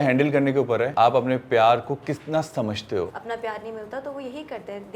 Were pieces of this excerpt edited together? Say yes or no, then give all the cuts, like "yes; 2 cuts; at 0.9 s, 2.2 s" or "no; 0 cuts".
yes; 2 cuts; at 0.9 s, 3.2 s